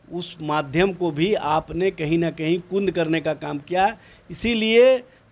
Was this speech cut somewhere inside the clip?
no; 0 cuts

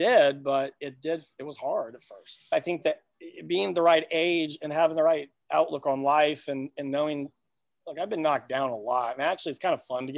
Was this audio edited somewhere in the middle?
yes; 1 cut; at 2.5 s

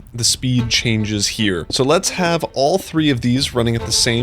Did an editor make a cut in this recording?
yes; 1 cut; at 1.7 s

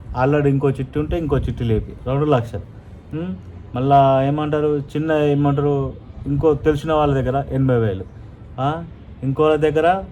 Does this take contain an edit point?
no; 0 cuts

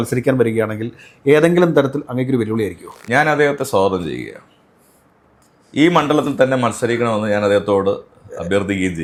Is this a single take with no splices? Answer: yes; 0 cuts

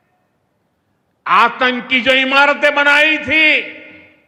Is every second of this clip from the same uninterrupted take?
yes; 0 cuts

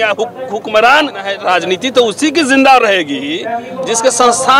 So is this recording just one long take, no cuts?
no; 1 cut; at 1.3 s

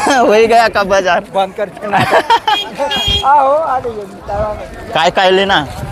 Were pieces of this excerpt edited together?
no; 0 cuts

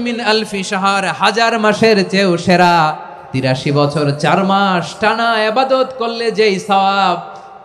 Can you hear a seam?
yes; 1 cut; at 3.5 s

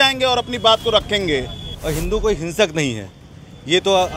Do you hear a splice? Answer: yes; 1 cut; at 1.7 s

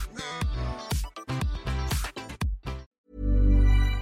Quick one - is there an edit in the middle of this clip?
yes; 1 cut; at 2.9 s

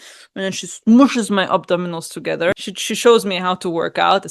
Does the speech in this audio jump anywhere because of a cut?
yes; 1 cut; at 2.6 s

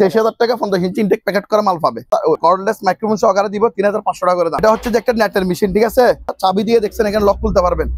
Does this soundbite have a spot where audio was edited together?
yes; 3 cuts; at 2.3 s, 4.6 s, 6.4 s

